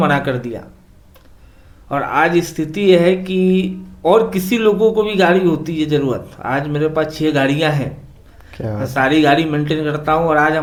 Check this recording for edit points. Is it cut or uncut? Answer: uncut